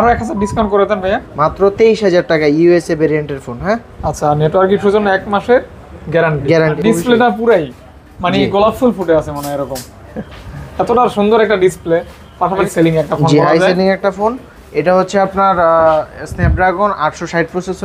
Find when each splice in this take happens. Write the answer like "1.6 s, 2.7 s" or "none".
1.4 s, 6.8 s, 12.7 s